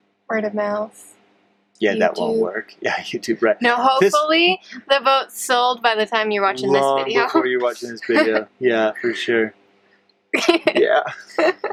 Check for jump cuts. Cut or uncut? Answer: uncut